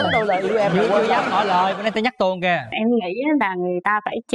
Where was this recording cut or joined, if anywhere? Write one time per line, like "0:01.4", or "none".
0:02.7